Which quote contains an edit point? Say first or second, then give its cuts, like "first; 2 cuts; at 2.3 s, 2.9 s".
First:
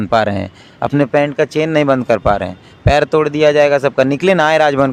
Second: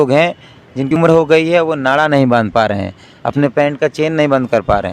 second; 1 cut; at 0.9 s